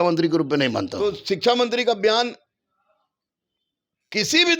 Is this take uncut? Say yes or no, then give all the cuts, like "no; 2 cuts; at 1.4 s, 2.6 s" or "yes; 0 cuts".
no; 1 cut; at 1.2 s